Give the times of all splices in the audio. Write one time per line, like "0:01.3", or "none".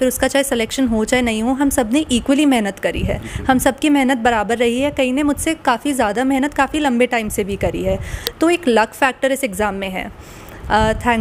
none